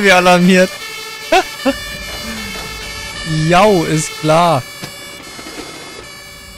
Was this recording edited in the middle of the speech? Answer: no; 0 cuts

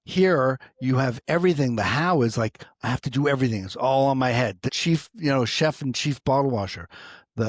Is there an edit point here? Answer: yes; 1 cut; at 4.6 s

